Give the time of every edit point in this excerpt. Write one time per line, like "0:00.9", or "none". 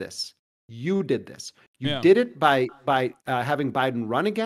none